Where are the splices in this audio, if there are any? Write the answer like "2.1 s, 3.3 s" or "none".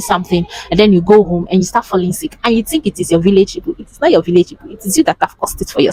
none